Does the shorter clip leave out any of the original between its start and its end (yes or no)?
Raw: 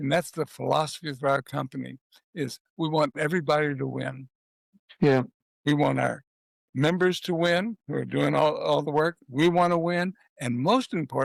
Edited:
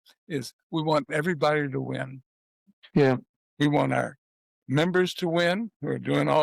no